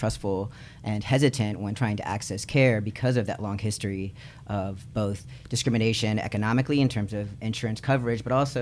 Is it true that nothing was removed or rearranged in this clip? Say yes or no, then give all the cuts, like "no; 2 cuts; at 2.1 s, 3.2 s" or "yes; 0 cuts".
yes; 0 cuts